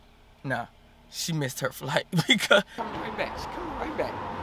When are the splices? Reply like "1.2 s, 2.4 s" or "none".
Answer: 2.8 s